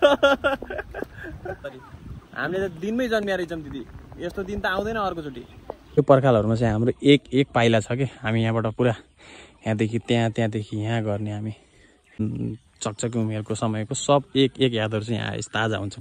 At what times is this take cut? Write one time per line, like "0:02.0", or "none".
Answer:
0:01.6
0:06.0
0:12.2